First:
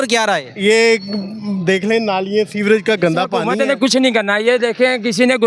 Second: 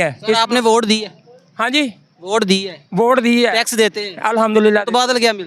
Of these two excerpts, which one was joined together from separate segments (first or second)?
first